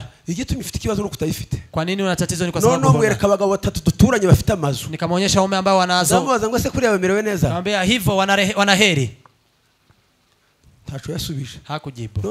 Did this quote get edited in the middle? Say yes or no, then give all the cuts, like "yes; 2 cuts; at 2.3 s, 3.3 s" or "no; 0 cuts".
no; 0 cuts